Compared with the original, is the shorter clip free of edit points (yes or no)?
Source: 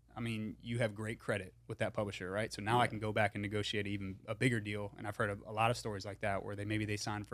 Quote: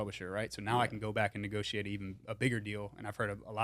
yes